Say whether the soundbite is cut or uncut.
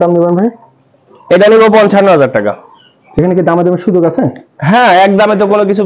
uncut